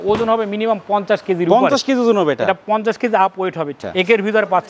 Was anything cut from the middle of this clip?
yes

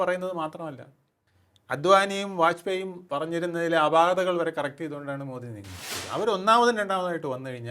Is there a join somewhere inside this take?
yes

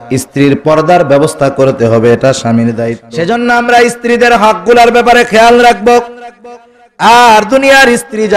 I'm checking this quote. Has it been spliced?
yes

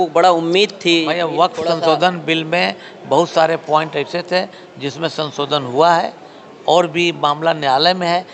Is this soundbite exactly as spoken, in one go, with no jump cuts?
yes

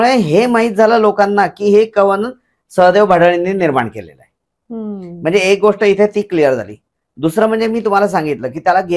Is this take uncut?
yes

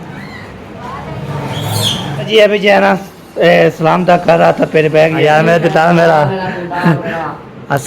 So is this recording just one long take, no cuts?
no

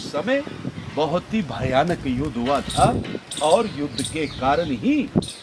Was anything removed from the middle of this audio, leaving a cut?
no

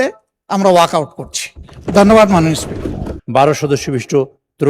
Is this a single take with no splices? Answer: no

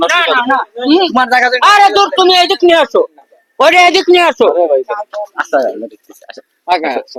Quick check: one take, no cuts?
yes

